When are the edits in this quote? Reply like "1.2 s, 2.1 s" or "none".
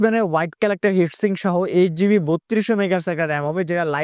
none